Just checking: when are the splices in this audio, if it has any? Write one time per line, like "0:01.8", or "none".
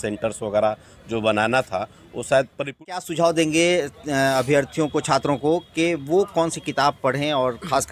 0:02.8